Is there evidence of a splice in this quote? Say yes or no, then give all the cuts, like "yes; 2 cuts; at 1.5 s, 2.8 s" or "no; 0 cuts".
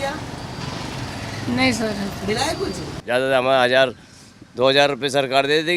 yes; 1 cut; at 2.9 s